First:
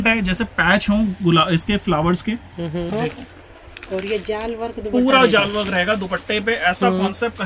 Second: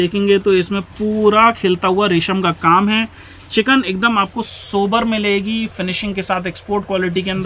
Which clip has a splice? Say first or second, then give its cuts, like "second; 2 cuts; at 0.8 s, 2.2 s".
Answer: first; 1 cut; at 2.9 s